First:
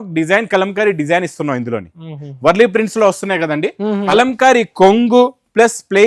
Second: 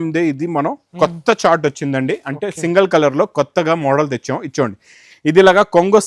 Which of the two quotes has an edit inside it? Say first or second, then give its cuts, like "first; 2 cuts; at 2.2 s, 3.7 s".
first; 1 cut; at 4.1 s